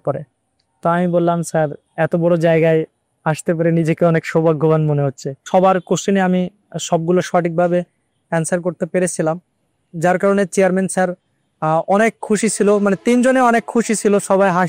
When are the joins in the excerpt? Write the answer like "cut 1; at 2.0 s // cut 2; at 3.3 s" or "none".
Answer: cut 1; at 1.8 s // cut 2; at 5.4 s